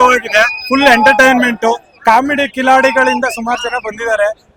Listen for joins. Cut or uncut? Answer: uncut